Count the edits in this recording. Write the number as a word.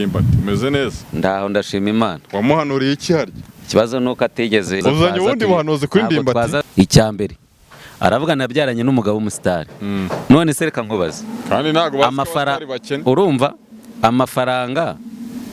two